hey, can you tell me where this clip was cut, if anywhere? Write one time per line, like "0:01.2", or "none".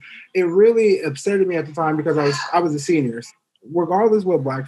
0:03.2